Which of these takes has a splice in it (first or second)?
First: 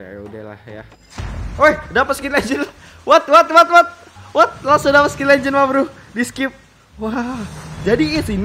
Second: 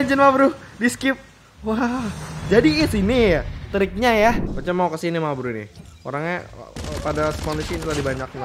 second